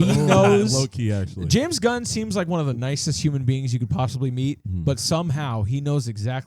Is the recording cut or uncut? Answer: uncut